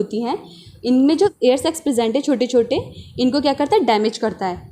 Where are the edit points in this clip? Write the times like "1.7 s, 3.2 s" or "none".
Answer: 1.3 s